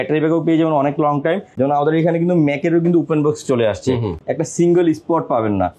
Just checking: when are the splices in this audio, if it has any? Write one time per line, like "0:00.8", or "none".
0:01.5
0:04.1